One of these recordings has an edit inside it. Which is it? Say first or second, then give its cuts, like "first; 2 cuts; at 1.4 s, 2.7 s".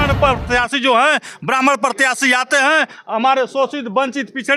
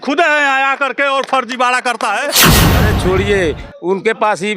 second; 1 cut; at 2.6 s